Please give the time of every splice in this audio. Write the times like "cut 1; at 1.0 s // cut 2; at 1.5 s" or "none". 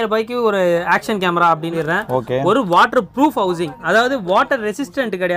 cut 1; at 1.7 s